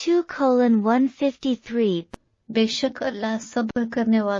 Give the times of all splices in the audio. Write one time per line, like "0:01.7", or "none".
none